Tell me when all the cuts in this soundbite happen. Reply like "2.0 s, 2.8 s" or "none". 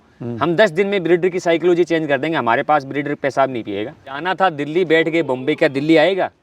4.2 s

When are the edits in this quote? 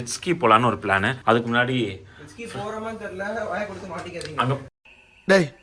1.1 s

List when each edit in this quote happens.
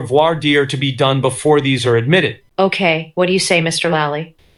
none

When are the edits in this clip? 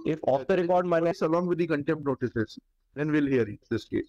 1.1 s

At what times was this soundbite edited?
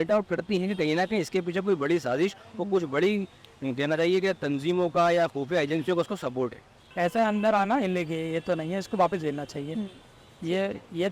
6.8 s

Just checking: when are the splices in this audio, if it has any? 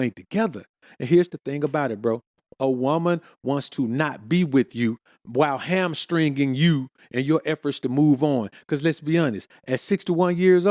none

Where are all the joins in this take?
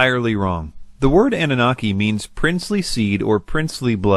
3.1 s

